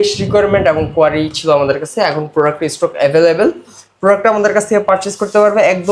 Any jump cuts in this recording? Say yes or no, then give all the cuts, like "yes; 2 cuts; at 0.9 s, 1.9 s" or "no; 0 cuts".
no; 0 cuts